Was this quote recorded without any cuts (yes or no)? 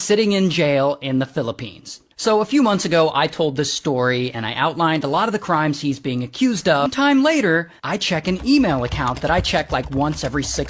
no